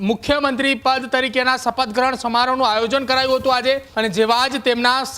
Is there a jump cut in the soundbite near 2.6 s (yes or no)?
no